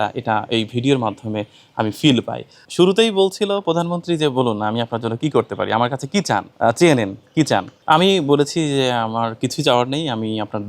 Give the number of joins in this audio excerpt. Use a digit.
3